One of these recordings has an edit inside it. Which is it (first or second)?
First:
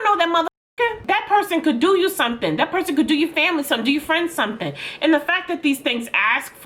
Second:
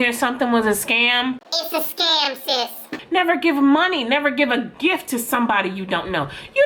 second